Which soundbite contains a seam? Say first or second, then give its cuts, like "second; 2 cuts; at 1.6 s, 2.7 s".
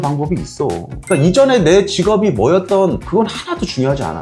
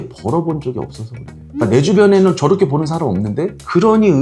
first; 1 cut; at 1.0 s